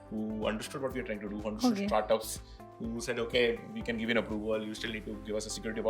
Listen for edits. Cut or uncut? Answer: uncut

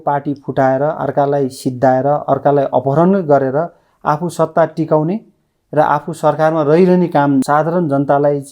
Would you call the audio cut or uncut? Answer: cut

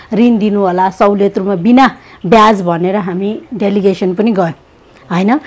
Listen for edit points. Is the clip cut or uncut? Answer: uncut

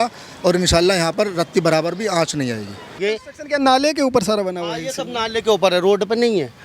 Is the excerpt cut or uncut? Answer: cut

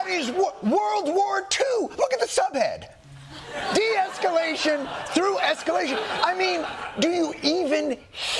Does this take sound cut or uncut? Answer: uncut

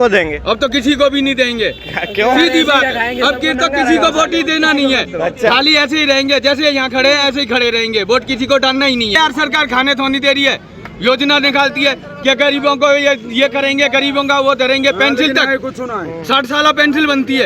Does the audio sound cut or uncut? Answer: cut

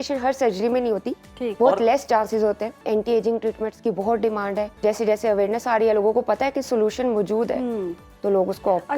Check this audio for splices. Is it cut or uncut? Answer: cut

